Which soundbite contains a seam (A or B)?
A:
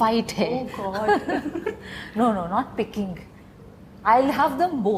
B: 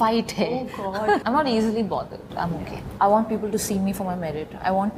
B